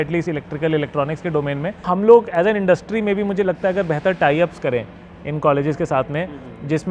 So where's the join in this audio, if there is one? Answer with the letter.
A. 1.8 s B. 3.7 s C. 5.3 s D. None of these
A